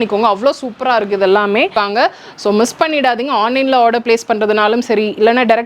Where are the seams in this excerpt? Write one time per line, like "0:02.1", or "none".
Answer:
0:01.7